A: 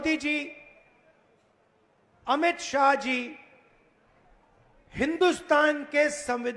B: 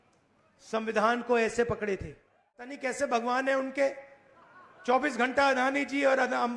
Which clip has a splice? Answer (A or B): B